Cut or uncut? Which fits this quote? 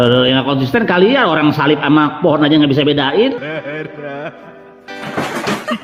uncut